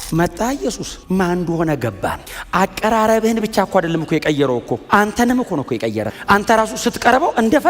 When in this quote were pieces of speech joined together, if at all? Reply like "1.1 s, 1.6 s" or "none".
0.9 s, 2.3 s, 6.1 s